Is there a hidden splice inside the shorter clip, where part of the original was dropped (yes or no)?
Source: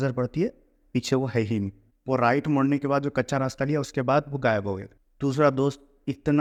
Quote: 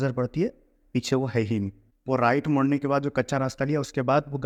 no